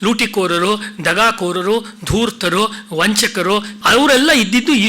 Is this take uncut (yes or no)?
no